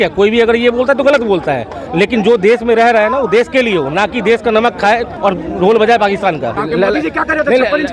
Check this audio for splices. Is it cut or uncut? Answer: cut